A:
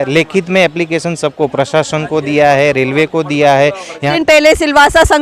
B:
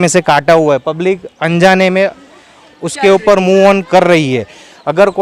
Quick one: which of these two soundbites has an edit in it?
A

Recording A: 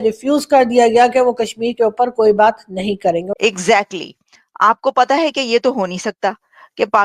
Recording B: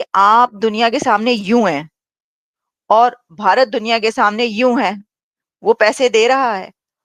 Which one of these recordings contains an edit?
A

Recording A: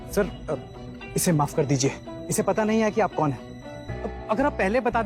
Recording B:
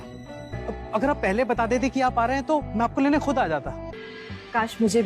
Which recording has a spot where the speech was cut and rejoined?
B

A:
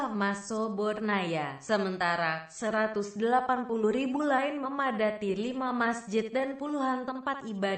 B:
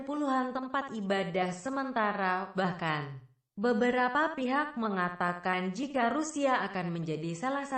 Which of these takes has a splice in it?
A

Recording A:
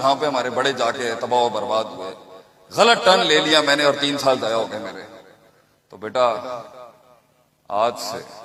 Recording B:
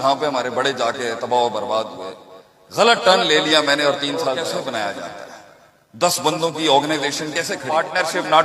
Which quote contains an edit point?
B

